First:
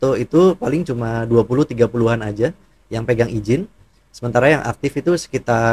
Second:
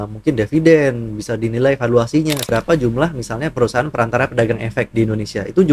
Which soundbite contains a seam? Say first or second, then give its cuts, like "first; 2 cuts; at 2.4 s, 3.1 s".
second; 1 cut; at 2.5 s